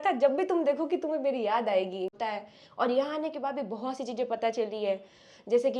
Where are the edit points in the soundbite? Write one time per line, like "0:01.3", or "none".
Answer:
0:02.1